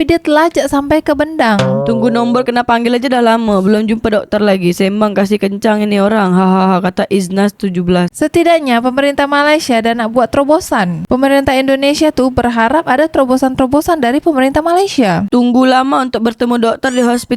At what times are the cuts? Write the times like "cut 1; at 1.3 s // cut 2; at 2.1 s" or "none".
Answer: cut 1; at 1.8 s // cut 2; at 15.2 s